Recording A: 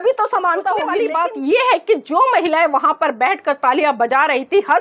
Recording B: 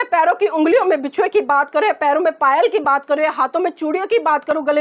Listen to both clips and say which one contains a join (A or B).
A